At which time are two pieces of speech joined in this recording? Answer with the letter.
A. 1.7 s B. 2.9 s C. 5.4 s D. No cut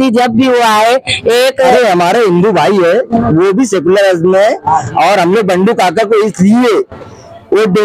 A